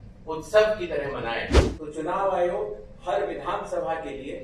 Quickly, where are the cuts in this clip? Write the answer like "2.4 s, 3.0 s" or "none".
1.6 s

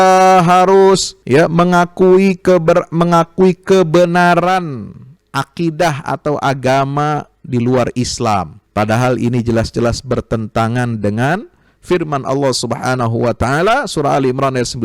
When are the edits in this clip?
1.1 s, 8.6 s

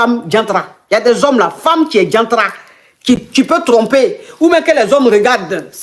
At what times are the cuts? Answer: none

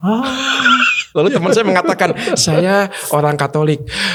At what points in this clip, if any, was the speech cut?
none

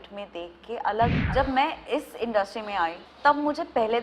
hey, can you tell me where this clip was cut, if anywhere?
1.2 s, 3.1 s

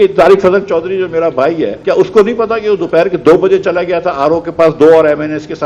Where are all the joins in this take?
1.8 s

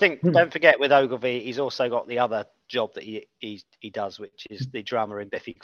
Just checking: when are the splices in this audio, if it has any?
none

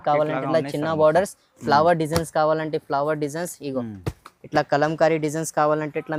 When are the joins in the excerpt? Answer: none

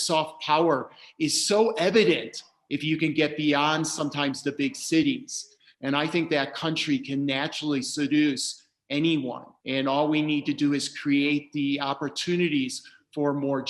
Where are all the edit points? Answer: 5.5 s

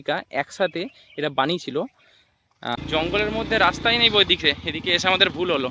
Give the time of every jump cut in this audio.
2.8 s

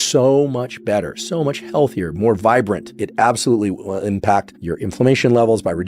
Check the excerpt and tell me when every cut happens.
2.9 s

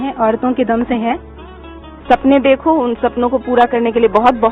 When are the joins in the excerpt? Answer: 1.8 s

